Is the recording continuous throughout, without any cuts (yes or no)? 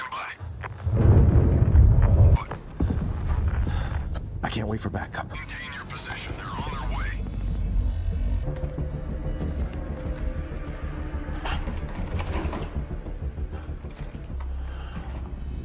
no